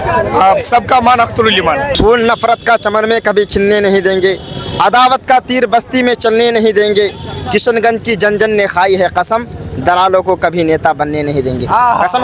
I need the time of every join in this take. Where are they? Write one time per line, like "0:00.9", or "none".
0:01.9